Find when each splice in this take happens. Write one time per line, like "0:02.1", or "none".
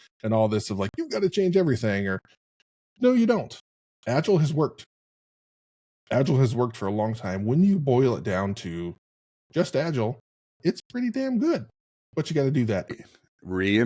0:12.9